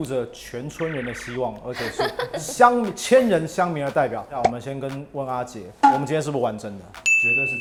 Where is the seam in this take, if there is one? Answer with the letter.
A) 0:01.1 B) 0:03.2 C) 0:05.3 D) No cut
D